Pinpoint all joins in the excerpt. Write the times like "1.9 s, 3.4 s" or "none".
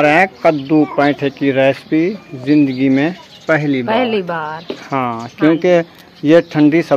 none